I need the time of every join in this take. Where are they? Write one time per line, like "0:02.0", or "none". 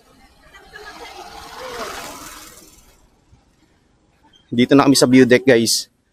none